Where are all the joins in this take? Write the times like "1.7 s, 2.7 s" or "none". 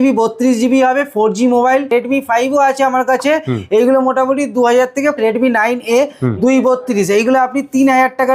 1.9 s, 5.2 s